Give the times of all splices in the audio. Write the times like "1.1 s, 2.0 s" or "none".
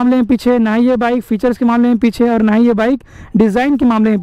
none